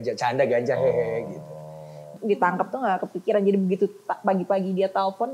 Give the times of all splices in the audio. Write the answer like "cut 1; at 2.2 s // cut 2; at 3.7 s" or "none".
cut 1; at 2.0 s